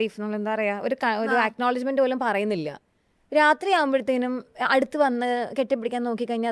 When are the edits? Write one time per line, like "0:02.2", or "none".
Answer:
none